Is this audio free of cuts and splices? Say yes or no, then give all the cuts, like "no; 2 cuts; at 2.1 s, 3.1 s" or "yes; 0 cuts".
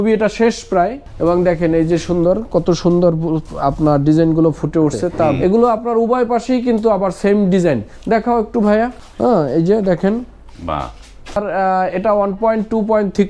no; 4 cuts; at 1.0 s, 5.4 s, 9.0 s, 11.4 s